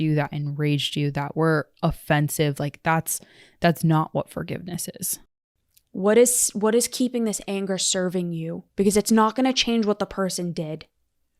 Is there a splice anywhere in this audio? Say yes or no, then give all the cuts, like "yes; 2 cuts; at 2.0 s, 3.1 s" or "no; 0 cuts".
yes; 1 cut; at 5.4 s